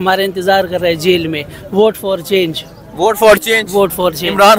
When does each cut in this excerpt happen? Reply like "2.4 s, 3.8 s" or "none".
none